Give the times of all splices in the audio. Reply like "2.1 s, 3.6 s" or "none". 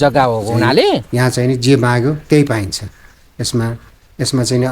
1.1 s